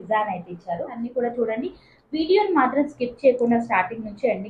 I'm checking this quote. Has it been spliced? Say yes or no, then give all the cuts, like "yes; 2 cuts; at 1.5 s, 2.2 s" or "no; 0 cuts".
yes; 1 cut; at 1.0 s